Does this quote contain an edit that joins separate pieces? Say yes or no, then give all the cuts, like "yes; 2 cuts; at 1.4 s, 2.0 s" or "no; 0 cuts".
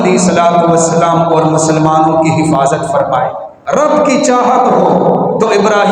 yes; 1 cut; at 3.5 s